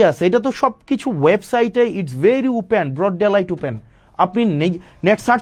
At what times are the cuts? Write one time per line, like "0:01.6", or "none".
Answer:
none